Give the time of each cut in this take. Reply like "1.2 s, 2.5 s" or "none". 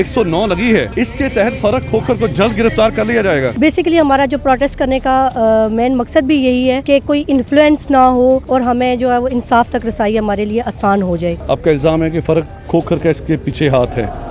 0.9 s, 3.5 s, 6.8 s, 8.4 s, 11.4 s